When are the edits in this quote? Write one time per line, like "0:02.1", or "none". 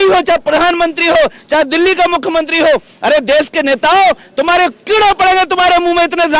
none